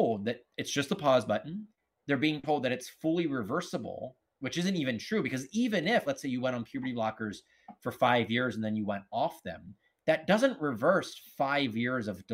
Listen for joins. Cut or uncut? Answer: uncut